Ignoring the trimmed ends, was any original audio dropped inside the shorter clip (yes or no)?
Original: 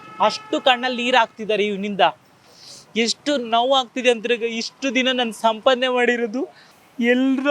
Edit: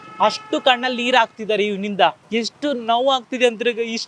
yes